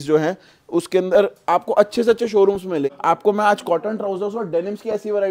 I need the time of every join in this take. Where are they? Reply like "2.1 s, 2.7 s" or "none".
2.9 s